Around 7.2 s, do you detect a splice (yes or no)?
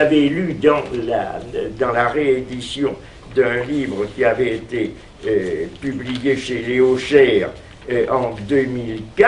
yes